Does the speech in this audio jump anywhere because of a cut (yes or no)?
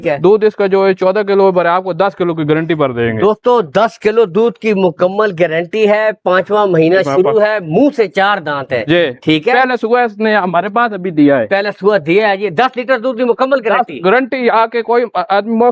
no